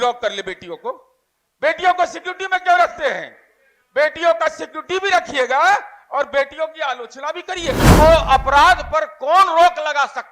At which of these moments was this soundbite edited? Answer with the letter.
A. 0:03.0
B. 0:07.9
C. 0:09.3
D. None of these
B